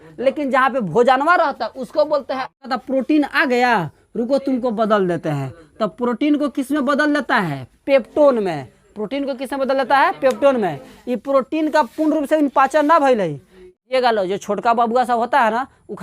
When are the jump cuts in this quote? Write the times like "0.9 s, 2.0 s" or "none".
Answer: 2.6 s, 13.8 s